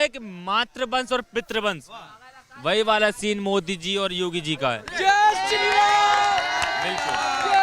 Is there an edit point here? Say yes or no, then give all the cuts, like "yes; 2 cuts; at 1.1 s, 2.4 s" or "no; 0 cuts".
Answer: no; 0 cuts